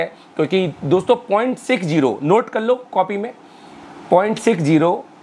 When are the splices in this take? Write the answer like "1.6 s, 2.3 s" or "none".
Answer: none